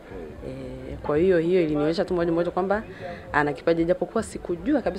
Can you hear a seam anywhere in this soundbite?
no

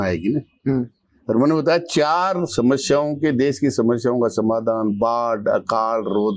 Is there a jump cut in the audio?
no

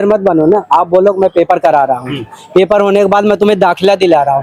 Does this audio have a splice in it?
no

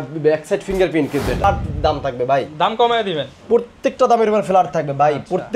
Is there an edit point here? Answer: yes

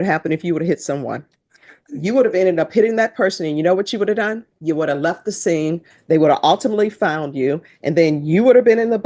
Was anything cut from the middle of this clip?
no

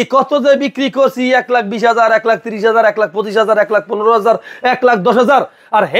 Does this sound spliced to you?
no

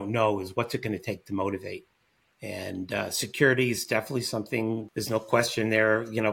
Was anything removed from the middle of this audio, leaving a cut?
yes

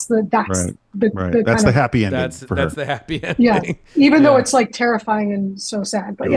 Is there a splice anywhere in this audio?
no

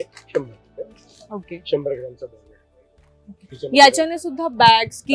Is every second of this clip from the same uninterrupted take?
yes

